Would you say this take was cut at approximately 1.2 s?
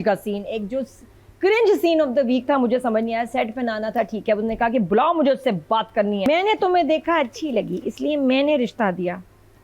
no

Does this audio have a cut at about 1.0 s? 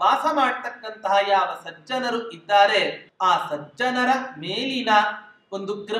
no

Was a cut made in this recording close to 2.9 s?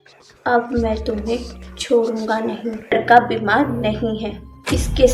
yes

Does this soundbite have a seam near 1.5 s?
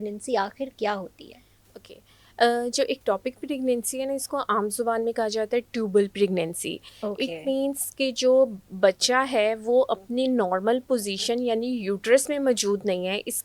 no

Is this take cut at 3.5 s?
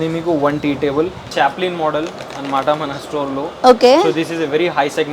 no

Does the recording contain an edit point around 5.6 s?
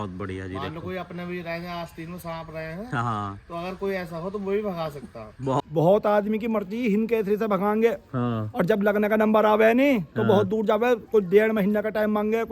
yes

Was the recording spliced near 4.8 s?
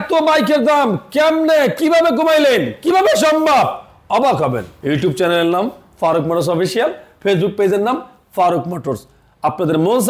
no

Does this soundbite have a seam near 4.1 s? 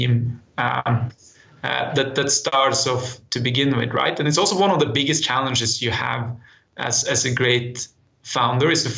no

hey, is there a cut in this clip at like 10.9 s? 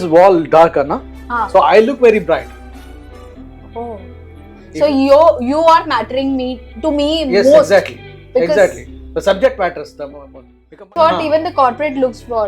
yes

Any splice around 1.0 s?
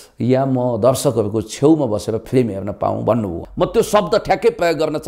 no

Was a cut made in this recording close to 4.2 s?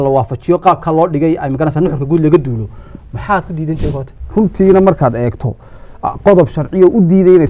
yes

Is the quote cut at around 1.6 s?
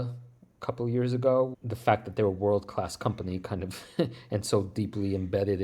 yes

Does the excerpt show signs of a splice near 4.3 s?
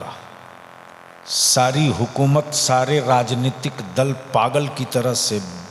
no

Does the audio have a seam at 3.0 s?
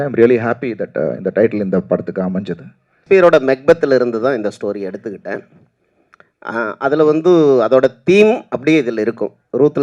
yes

